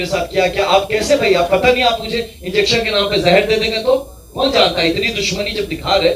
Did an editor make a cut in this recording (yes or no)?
no